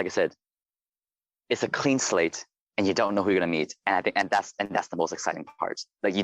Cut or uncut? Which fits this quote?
uncut